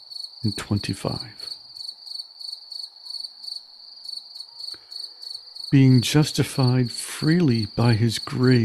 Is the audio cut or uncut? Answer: uncut